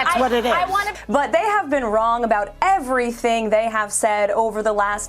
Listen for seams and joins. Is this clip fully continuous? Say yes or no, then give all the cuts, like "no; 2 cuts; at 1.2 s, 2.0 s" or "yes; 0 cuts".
no; 1 cut; at 0.9 s